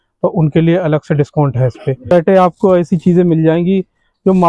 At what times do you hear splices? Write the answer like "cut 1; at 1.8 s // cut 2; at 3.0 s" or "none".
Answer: cut 1; at 2.1 s